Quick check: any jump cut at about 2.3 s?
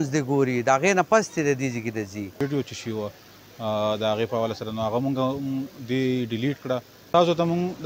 yes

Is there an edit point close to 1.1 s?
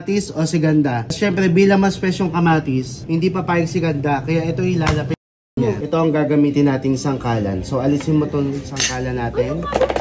yes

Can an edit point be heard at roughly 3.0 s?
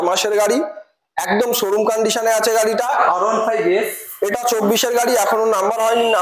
yes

